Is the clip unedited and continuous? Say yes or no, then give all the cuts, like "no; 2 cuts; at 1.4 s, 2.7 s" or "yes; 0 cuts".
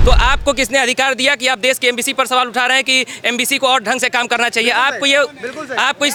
yes; 0 cuts